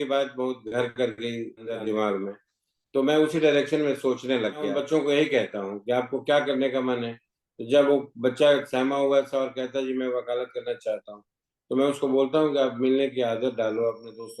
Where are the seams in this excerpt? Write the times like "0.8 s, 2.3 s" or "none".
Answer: 1.6 s, 4.8 s